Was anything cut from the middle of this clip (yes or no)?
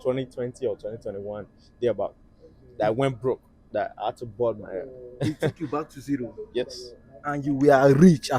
no